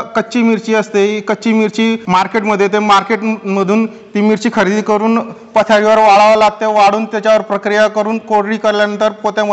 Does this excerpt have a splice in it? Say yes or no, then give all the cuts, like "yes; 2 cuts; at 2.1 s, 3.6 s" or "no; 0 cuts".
yes; 1 cut; at 2.0 s